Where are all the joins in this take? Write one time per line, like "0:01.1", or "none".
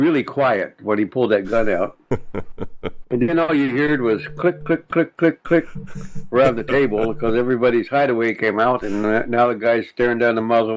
none